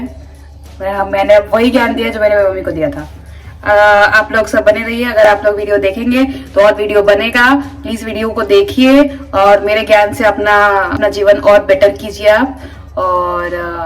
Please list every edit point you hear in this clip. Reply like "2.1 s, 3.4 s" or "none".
11.0 s

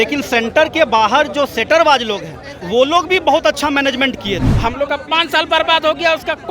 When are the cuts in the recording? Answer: 4.5 s

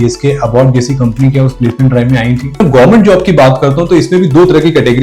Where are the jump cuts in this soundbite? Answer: 2.6 s

